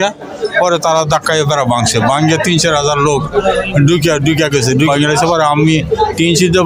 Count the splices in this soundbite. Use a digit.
1